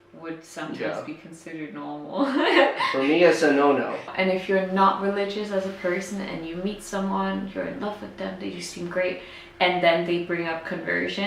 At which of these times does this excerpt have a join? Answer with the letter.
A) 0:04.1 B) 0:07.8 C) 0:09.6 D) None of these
A